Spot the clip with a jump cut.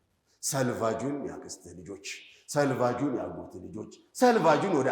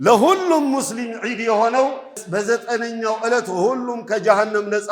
second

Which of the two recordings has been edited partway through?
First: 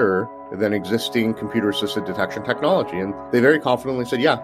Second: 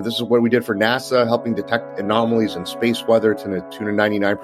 first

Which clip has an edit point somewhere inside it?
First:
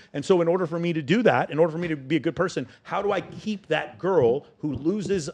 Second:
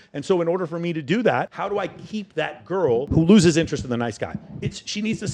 second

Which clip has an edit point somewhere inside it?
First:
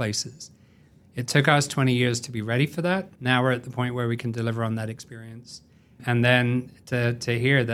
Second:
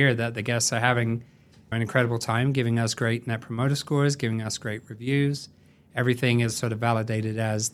first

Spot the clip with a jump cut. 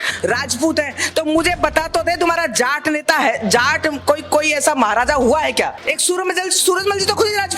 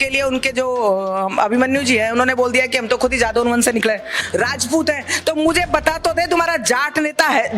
first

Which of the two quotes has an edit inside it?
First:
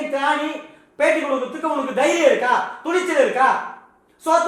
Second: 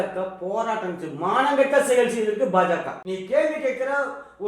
second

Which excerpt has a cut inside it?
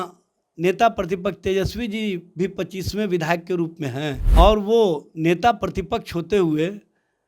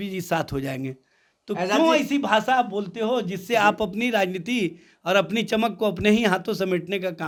first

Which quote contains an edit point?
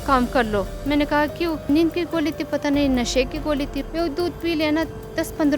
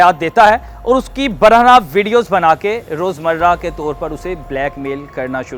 first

